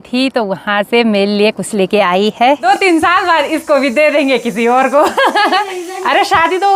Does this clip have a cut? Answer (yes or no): yes